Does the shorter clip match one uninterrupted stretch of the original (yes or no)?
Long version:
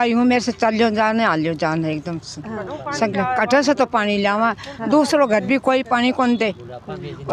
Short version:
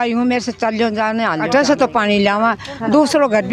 no